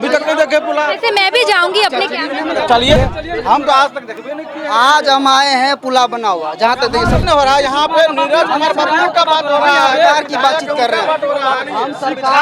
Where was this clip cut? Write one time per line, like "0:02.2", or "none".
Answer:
0:03.0
0:07.2